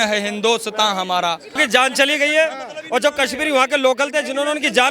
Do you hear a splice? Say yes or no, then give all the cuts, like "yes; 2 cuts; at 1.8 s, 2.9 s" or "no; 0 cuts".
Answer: yes; 1 cut; at 1.6 s